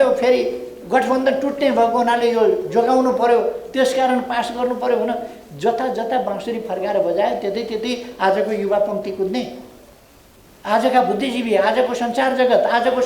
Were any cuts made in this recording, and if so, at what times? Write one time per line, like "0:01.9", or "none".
none